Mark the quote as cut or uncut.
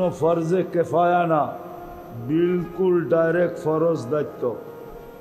uncut